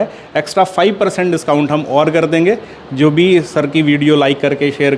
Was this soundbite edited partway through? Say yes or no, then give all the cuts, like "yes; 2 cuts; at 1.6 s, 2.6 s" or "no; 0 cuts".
no; 0 cuts